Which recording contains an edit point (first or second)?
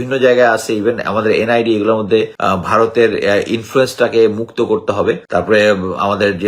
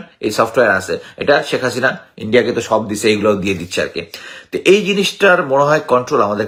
first